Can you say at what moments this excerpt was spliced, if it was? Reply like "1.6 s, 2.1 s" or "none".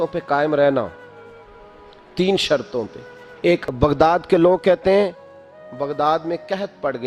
3.6 s